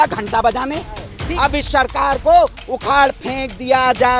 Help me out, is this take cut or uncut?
cut